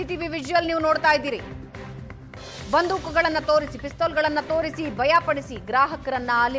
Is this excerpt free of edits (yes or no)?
yes